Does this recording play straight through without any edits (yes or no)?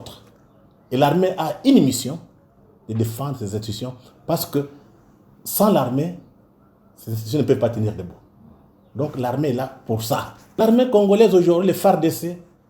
no